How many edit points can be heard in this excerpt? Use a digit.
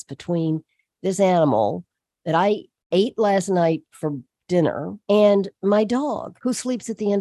2